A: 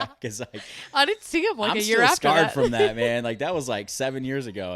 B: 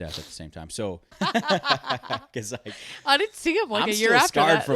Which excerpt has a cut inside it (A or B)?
B